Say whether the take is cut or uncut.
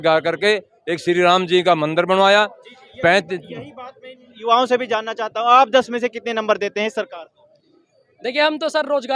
uncut